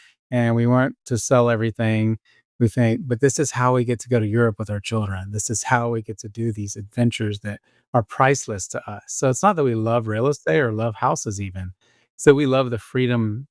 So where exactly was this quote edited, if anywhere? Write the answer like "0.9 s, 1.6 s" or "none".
none